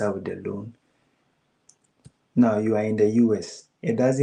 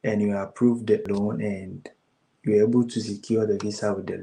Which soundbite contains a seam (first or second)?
second